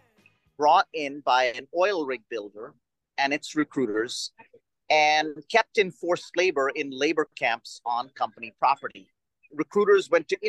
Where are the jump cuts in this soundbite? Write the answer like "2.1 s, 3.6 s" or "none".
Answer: 9.5 s